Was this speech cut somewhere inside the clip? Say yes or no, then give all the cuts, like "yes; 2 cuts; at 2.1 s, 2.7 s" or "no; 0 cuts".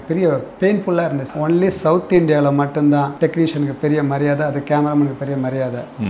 yes; 2 cuts; at 1.3 s, 3.1 s